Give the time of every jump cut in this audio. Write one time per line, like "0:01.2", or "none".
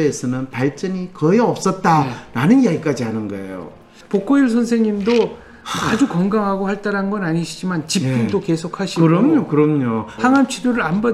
0:03.9
0:10.1